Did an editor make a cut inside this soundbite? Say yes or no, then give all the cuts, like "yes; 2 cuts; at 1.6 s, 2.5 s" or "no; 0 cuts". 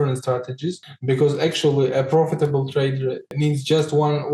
yes; 1 cut; at 3.3 s